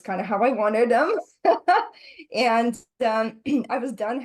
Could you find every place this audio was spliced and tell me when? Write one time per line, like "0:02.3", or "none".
none